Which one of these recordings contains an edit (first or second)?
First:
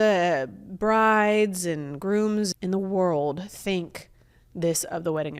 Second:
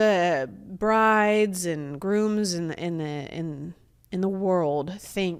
first